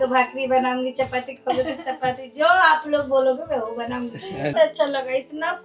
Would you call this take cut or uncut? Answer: cut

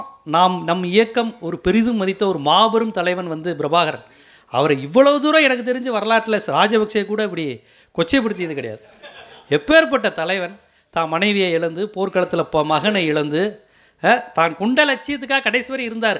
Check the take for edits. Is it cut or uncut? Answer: uncut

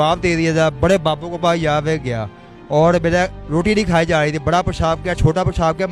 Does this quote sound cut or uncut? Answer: uncut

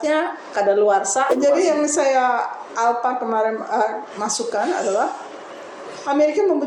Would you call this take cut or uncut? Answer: cut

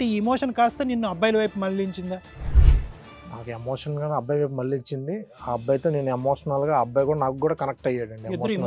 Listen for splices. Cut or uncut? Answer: uncut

